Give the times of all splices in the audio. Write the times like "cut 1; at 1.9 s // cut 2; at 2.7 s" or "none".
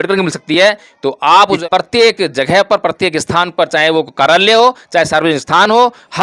cut 1; at 1.6 s